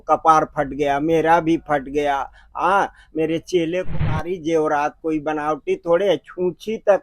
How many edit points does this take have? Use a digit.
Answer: 1